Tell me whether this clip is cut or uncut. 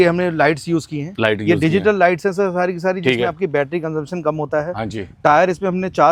uncut